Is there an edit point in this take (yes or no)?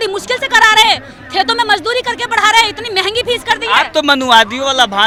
no